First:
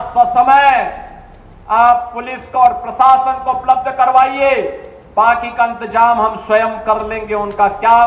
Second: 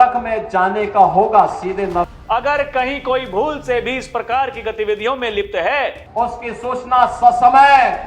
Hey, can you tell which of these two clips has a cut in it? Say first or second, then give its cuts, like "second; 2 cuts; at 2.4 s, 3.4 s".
second; 2 cuts; at 2.1 s, 6.0 s